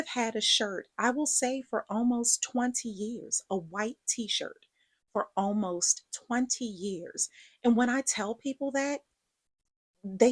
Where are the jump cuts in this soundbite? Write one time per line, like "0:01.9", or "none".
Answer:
none